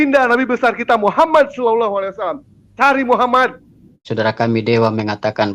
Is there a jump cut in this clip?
yes; 1 cut; at 4.0 s

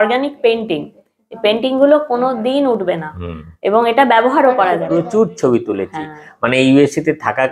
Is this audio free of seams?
no; 1 cut; at 5.0 s

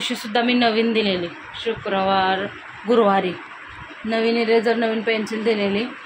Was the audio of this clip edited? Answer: no; 0 cuts

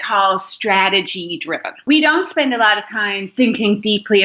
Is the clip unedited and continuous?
no; 2 cuts; at 1.8 s, 3.3 s

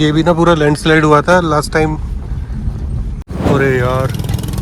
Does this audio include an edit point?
yes; 1 cut; at 3.3 s

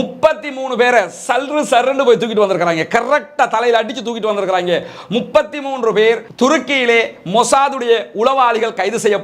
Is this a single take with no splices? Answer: yes; 0 cuts

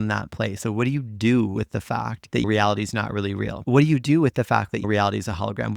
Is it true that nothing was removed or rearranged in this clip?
no; 1 cut; at 3.6 s

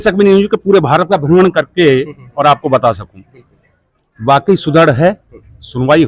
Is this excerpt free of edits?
yes; 0 cuts

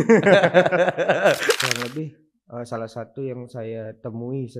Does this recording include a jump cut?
yes; 1 cut; at 1.6 s

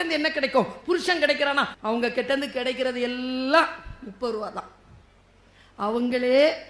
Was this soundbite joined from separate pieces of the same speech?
yes; 1 cut; at 1.7 s

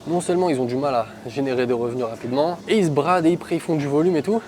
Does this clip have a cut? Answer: yes; 1 cut; at 2.6 s

